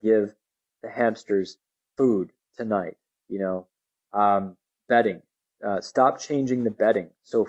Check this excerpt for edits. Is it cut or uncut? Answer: uncut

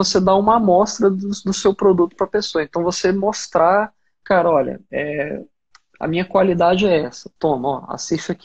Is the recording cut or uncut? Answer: uncut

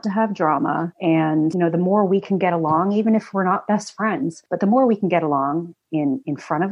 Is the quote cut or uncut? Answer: cut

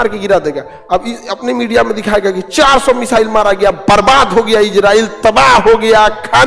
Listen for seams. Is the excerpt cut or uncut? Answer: uncut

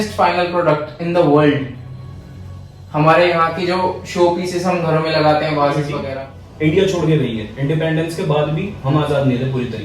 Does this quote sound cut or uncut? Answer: cut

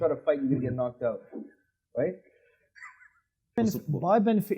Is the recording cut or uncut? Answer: cut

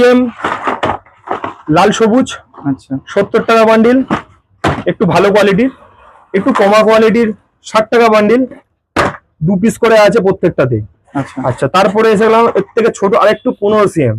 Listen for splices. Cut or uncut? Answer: uncut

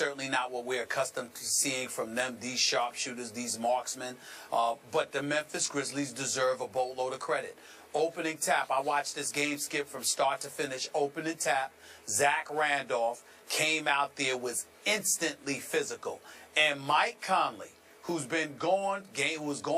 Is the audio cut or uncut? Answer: cut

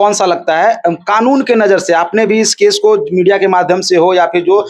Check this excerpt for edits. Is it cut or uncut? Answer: uncut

